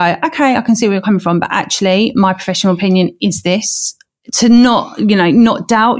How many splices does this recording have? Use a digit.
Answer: 1